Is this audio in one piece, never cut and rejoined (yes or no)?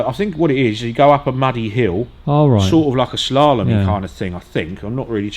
no